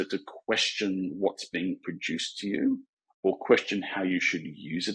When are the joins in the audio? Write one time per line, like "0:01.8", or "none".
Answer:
none

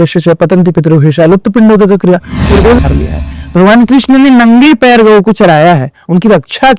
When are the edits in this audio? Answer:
0:02.8

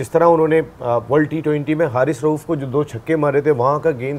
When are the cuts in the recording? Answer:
none

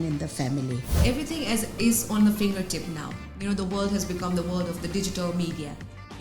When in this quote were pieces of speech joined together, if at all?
0:01.0

